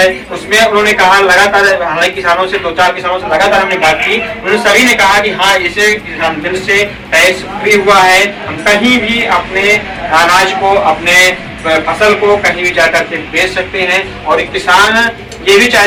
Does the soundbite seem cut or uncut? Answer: uncut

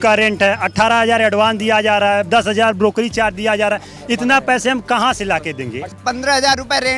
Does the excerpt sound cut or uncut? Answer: cut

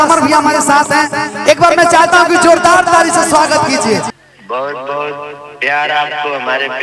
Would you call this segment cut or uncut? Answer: cut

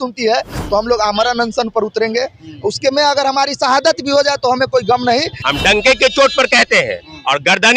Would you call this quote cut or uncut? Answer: cut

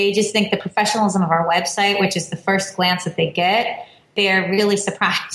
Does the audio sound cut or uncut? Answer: uncut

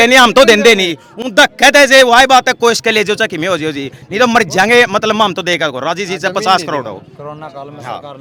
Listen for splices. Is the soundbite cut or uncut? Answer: uncut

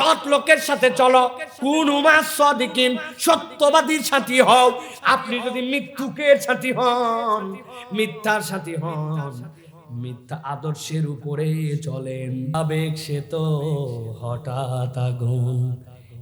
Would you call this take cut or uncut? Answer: cut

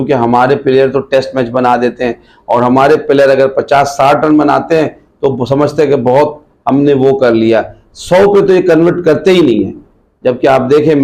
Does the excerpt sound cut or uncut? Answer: uncut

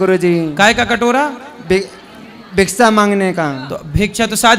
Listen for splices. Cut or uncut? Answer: uncut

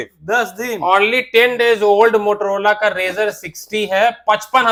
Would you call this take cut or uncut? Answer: uncut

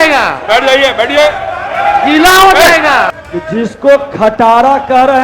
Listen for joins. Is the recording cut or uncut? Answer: cut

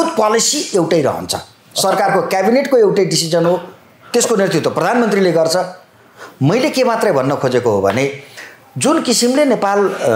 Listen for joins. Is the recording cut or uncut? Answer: uncut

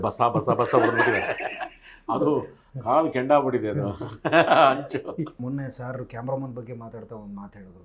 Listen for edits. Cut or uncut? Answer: cut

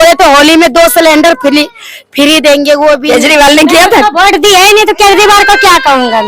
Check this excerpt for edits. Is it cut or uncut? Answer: cut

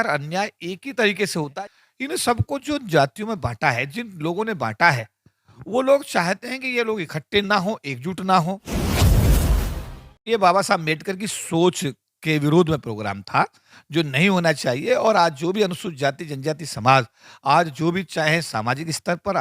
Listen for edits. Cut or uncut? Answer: cut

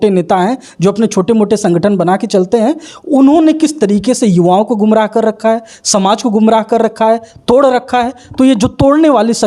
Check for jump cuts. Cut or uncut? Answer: uncut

